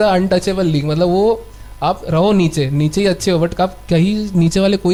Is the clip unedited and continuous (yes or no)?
yes